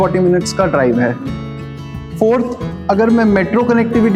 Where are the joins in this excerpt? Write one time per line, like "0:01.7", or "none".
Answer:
none